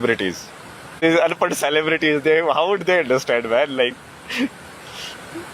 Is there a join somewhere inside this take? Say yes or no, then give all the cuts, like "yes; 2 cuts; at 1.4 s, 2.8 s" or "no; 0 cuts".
yes; 1 cut; at 1.0 s